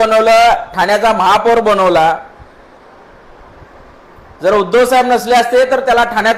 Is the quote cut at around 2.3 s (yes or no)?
no